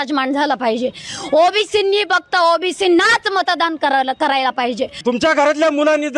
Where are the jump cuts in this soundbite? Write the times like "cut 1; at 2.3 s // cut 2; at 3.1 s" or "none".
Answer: cut 1; at 5.0 s